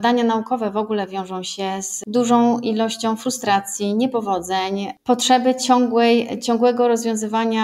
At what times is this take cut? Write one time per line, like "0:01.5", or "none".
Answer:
none